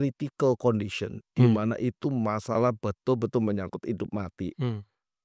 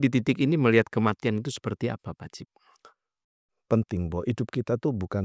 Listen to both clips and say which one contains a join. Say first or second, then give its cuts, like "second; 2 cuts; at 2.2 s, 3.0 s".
second; 1 cut; at 3.2 s